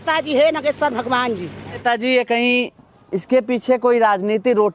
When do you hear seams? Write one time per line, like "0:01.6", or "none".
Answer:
0:01.7